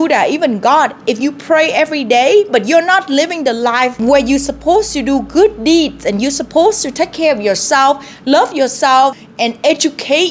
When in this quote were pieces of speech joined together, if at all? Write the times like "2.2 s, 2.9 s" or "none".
4.0 s, 9.2 s